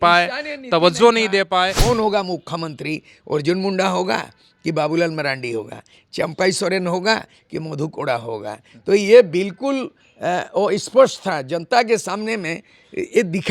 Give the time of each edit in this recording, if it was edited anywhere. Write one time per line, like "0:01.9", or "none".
0:01.8

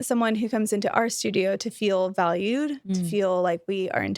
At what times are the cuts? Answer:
none

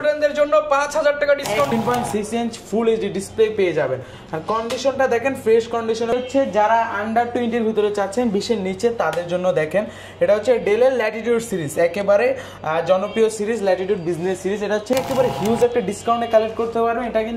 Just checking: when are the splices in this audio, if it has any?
0:01.7
0:06.1
0:14.9

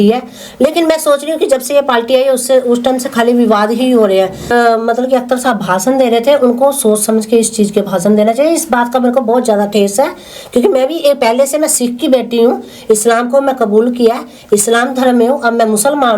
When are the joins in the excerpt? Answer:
0:04.5

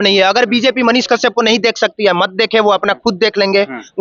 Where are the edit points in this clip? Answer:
none

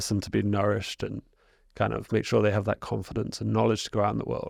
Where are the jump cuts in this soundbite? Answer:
none

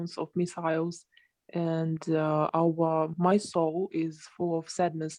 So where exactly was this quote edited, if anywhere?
none

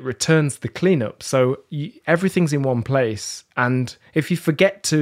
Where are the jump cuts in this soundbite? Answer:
none

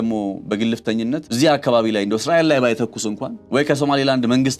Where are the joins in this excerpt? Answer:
0:01.3
0:03.3

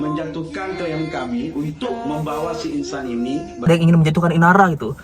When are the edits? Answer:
0:03.7

